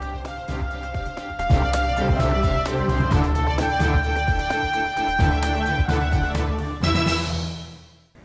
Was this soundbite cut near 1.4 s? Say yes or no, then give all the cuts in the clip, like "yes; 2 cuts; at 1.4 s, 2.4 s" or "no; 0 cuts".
no; 0 cuts